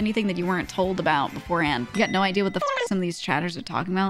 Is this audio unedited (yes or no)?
no